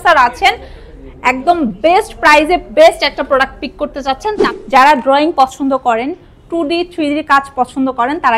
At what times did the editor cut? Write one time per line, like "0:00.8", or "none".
0:04.4